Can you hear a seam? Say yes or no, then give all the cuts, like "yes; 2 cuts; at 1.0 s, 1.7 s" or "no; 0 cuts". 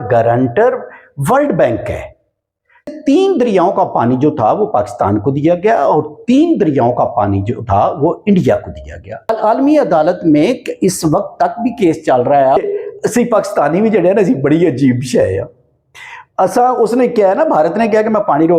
yes; 3 cuts; at 2.9 s, 9.4 s, 12.6 s